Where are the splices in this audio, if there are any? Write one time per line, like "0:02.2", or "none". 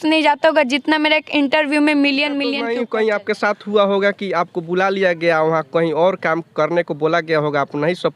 0:02.6